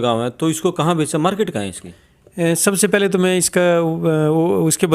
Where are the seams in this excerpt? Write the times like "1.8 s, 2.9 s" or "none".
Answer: none